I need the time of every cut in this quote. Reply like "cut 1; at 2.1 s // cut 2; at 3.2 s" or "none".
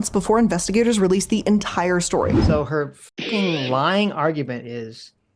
cut 1; at 2.4 s